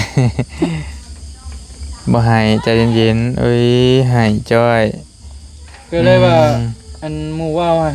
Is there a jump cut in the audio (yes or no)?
no